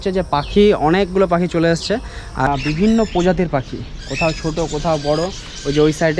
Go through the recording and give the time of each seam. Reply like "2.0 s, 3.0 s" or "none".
2.5 s